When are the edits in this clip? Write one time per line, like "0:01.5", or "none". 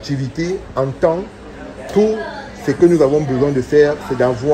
none